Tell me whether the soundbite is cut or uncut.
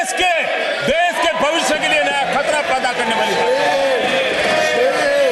uncut